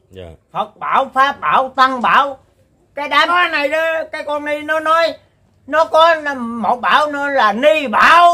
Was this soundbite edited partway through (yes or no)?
yes